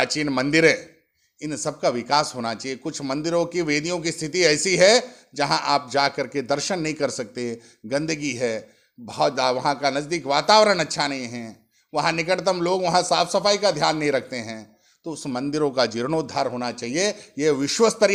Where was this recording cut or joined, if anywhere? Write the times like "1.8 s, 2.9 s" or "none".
none